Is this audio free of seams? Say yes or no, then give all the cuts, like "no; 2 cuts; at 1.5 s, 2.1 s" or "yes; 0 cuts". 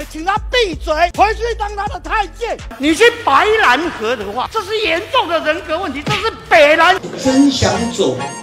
no; 3 cuts; at 1.1 s, 2.7 s, 7.0 s